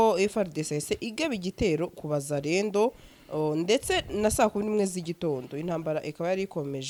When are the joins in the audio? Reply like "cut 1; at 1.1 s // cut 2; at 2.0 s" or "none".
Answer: none